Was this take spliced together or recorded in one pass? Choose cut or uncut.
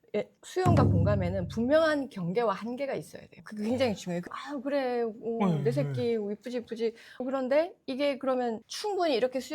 cut